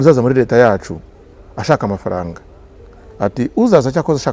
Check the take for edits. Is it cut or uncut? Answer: uncut